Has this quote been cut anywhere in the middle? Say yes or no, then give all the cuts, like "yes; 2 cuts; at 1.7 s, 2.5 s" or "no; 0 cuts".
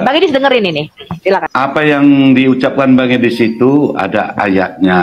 yes; 1 cut; at 1.5 s